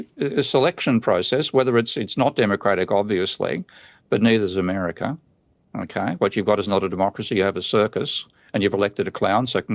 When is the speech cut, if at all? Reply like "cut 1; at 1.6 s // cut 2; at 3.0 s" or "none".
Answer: none